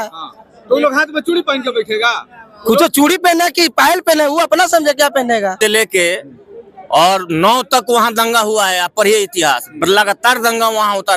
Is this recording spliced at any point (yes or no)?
yes